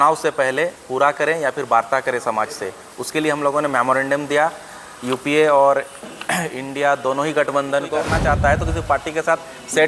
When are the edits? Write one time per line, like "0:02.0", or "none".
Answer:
0:08.1